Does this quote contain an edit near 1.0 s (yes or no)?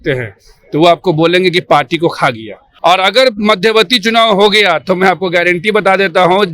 no